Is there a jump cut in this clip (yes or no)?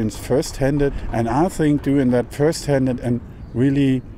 yes